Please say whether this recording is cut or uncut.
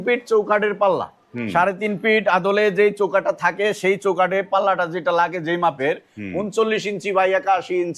uncut